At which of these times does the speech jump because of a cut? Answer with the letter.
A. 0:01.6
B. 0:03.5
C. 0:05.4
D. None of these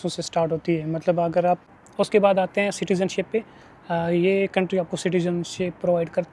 A